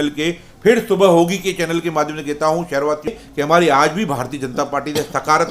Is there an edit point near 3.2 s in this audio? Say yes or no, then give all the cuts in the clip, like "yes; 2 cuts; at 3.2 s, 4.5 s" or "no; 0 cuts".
yes; 1 cut; at 3.2 s